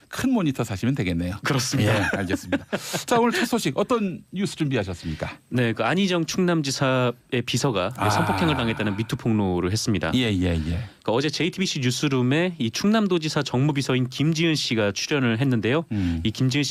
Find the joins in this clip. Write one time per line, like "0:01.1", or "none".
none